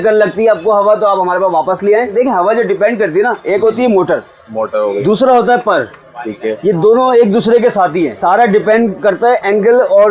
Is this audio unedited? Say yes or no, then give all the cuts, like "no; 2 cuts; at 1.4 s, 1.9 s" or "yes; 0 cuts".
no; 2 cuts; at 2.1 s, 8.2 s